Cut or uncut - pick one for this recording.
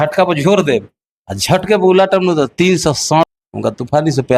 cut